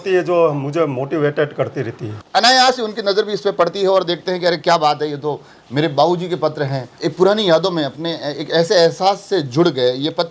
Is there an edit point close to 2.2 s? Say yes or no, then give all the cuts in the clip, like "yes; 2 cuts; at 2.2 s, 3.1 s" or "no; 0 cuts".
yes; 2 cuts; at 2.2 s, 6.9 s